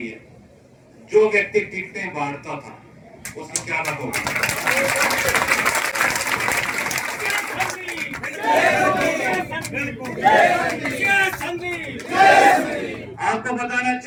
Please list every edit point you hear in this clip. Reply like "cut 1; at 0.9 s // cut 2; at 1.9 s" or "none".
none